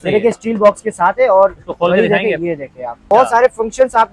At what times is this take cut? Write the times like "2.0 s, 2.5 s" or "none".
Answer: 3.0 s

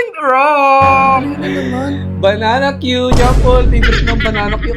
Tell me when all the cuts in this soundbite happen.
none

